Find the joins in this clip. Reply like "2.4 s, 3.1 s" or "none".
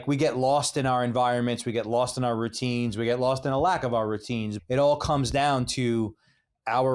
4.5 s